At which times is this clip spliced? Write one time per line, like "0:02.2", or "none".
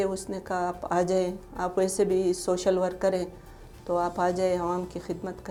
none